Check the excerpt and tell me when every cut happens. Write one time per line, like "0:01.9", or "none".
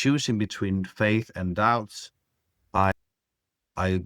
0:02.9